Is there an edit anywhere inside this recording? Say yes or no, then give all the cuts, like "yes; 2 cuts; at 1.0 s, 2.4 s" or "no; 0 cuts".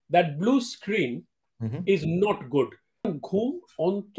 yes; 1 cut; at 3.1 s